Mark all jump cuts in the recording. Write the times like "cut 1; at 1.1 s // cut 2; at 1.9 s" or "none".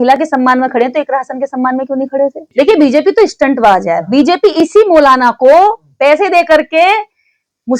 cut 1; at 2.4 s